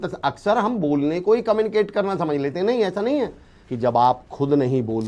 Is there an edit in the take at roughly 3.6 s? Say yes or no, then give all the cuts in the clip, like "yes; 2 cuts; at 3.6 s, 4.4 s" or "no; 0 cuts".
yes; 1 cut; at 3.6 s